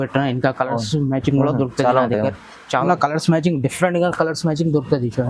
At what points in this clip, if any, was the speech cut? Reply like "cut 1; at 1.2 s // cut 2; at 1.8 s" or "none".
cut 1; at 2.9 s